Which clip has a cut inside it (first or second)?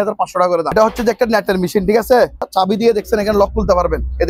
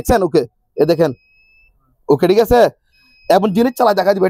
first